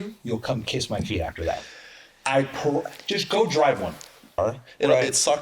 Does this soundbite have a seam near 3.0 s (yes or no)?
no